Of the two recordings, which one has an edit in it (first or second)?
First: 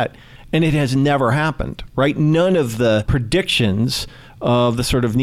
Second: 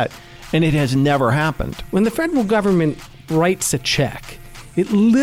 second